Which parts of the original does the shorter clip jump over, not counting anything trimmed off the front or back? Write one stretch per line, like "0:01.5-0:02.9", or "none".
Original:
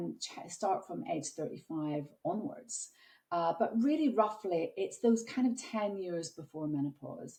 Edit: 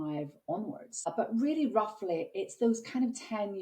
0:02.8-0:03.5